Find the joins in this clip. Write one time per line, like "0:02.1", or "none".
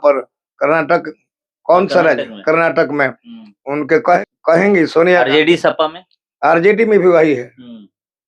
0:04.2